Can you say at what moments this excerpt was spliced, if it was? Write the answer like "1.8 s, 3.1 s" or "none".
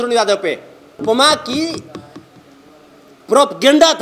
1.0 s